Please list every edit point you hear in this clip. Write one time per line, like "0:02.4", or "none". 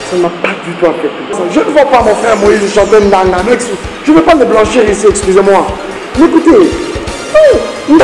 0:01.4